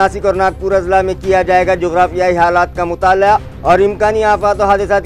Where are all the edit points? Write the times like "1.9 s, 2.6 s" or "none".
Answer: none